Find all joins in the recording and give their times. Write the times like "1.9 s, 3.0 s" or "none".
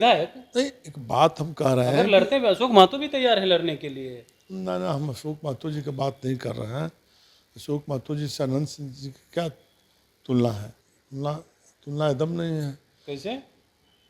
10.7 s